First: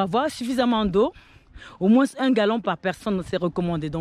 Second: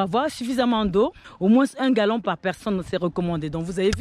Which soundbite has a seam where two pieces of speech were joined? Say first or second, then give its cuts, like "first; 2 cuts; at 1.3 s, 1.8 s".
second; 1 cut; at 1.2 s